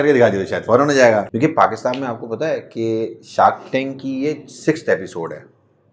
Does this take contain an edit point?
yes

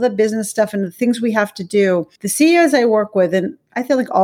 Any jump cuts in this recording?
yes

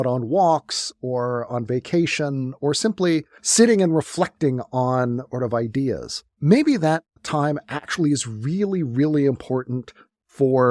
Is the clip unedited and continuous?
yes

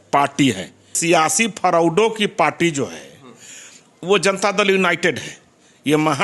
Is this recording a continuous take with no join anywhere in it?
no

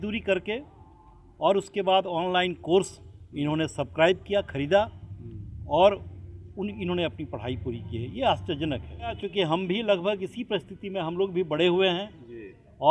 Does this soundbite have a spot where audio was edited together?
yes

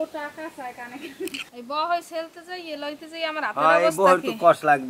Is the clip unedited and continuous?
no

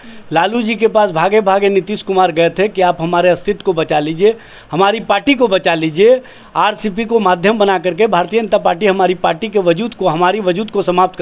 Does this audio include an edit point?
no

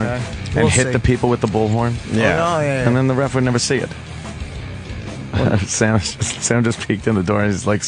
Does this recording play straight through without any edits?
no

